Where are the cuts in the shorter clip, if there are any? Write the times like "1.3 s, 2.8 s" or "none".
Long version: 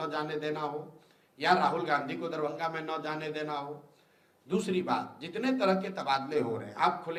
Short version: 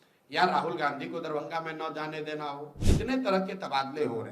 2.8 s